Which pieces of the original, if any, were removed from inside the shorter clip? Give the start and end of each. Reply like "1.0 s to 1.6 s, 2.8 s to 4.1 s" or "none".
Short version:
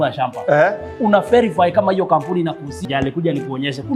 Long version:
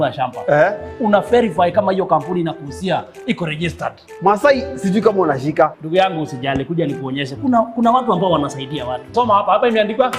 2.8 s to 6.3 s